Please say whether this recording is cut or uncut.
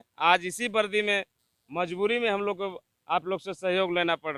uncut